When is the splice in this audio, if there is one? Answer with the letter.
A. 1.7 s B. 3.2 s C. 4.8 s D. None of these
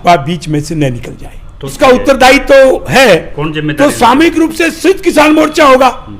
A